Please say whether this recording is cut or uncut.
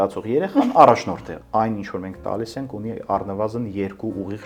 cut